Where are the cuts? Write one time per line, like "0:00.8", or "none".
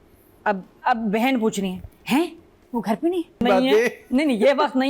0:03.4